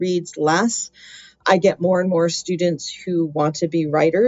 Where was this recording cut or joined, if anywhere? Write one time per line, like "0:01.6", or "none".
0:01.4

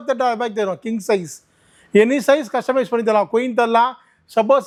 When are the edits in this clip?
none

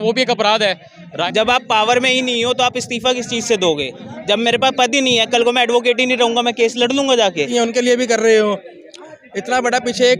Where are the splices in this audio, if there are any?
0:01.2
0:07.5

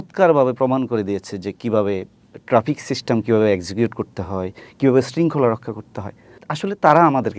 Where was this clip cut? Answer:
0:06.4

